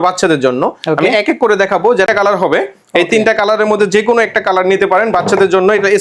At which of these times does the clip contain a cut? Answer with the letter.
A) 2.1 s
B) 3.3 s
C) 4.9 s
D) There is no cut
A